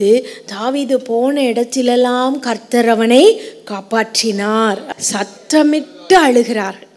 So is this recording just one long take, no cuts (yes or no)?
no